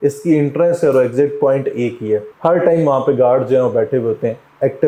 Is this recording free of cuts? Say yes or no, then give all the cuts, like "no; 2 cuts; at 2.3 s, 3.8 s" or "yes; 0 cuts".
yes; 0 cuts